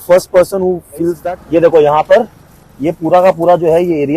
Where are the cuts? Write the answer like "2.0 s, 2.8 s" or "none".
1.2 s